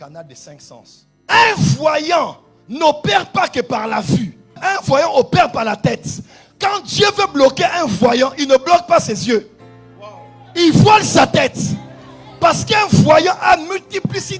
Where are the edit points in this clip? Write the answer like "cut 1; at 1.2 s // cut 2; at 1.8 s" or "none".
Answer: cut 1; at 1.1 s